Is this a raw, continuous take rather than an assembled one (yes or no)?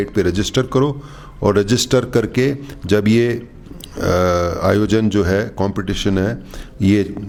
yes